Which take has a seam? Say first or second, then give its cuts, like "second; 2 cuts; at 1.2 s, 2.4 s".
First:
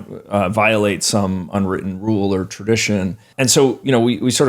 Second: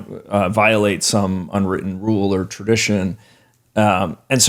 first; 1 cut; at 3.3 s